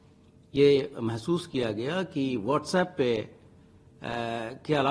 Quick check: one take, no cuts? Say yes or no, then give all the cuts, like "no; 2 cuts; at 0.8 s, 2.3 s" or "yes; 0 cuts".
yes; 0 cuts